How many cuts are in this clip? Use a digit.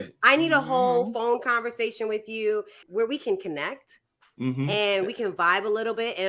1